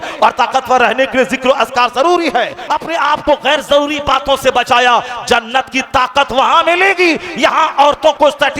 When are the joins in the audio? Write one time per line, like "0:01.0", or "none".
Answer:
0:02.6